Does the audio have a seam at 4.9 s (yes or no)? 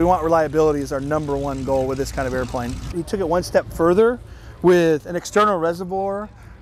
no